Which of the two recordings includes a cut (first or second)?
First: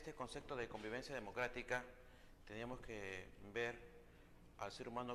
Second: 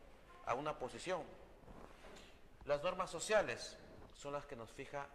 first